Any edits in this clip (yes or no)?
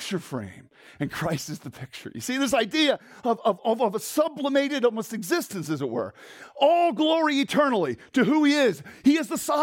no